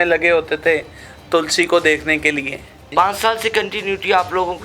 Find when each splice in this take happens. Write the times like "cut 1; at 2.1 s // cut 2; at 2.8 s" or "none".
cut 1; at 2.9 s

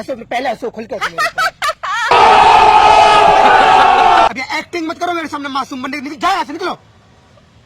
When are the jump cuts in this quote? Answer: cut 1; at 4.3 s

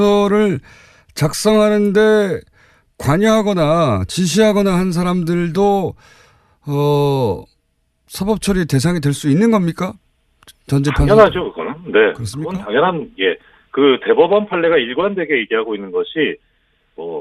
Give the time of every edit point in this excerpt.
cut 1; at 8.4 s

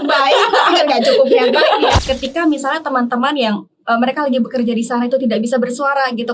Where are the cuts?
cut 1; at 2.0 s

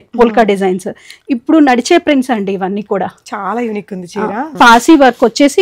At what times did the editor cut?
cut 1; at 4.5 s

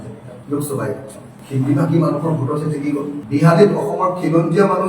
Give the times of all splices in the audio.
cut 1; at 1.4 s // cut 2; at 3.2 s

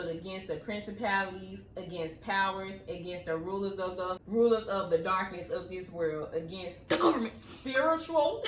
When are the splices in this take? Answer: cut 1; at 4.2 s

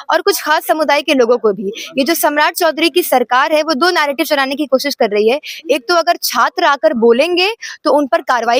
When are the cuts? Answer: none

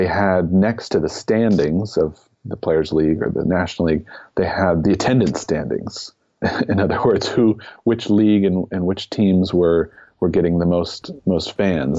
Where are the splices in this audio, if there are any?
cut 1; at 4.8 s // cut 2; at 6.4 s

